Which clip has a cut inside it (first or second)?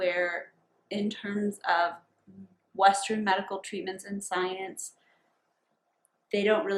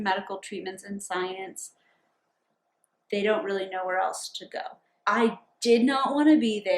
second